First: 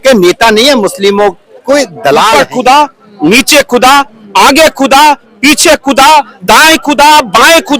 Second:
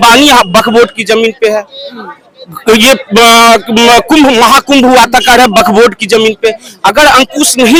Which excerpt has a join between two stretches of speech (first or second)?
first